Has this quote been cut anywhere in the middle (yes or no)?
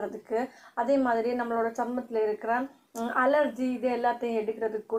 no